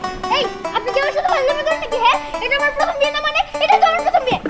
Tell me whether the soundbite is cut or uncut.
uncut